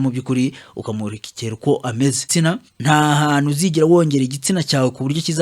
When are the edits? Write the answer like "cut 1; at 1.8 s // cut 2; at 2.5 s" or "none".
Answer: cut 1; at 2.2 s